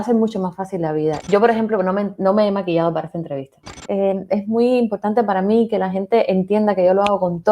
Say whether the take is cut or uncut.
cut